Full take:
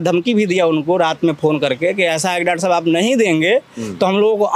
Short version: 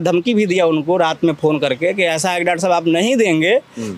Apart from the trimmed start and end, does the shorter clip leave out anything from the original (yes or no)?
no